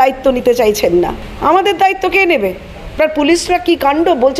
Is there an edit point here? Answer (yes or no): yes